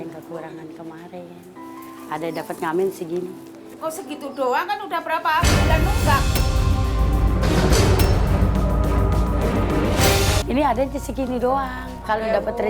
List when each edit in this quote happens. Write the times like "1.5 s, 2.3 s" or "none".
none